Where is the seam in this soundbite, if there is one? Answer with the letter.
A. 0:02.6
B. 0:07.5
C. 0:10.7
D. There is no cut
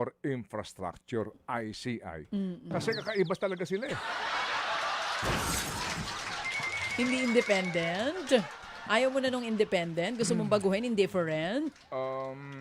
D